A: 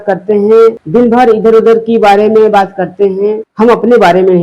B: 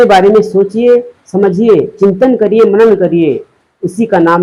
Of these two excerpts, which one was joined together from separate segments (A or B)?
A